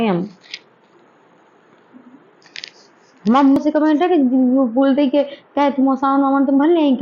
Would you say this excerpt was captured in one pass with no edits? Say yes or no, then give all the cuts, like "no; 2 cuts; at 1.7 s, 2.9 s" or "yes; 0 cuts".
no; 1 cut; at 3.6 s